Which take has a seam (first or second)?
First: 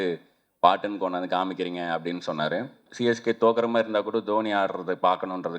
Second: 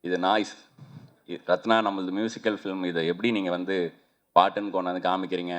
first